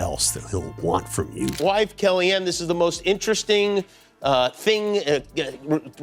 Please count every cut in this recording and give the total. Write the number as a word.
one